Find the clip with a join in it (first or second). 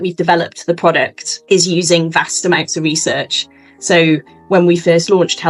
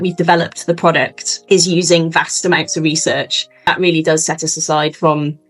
second